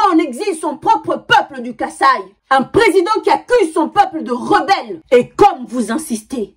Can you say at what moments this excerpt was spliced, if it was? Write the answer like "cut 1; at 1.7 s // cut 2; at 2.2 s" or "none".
cut 1; at 2.3 s // cut 2; at 4.9 s